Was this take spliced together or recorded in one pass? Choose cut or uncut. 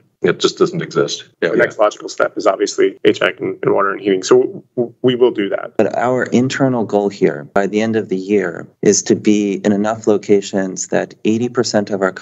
cut